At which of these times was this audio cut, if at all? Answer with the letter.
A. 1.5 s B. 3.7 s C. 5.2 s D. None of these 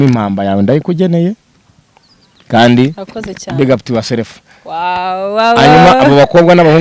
D